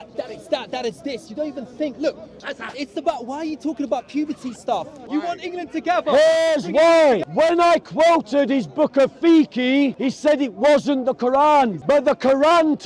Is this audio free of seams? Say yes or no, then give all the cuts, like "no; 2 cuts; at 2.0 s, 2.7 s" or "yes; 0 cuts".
no; 5 cuts; at 2.4 s, 5.0 s, 7.3 s, 10.0 s, 11.8 s